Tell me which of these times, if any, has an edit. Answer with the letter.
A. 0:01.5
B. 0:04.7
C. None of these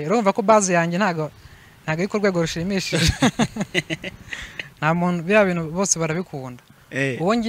B